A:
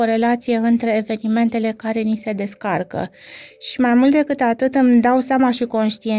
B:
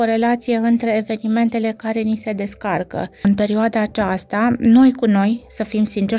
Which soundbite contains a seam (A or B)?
B